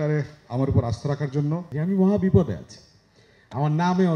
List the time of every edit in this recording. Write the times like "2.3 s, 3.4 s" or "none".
1.7 s